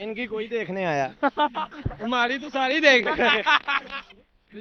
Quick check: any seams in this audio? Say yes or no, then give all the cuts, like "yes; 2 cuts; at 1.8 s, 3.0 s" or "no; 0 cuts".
no; 0 cuts